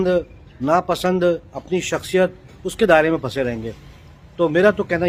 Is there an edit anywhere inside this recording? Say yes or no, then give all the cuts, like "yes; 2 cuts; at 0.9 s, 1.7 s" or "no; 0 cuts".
no; 0 cuts